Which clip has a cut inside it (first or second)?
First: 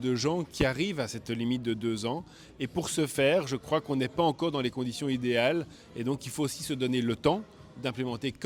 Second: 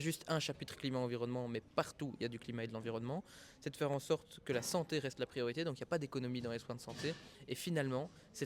second